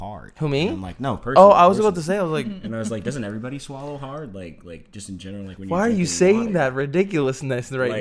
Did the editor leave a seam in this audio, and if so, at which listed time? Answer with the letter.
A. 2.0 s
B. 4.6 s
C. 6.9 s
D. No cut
D